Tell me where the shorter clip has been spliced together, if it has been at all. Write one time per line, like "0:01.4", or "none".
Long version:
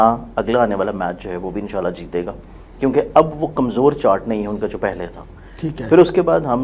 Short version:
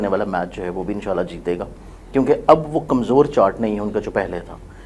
none